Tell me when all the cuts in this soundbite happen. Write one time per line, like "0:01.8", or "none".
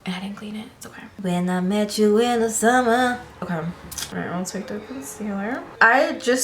none